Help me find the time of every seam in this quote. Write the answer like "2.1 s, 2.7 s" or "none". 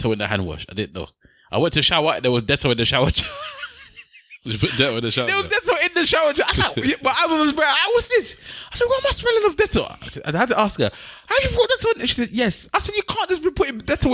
none